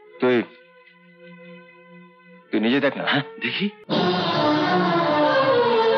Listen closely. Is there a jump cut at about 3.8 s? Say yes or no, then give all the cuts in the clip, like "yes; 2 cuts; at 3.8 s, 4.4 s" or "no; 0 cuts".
yes; 1 cut; at 3.8 s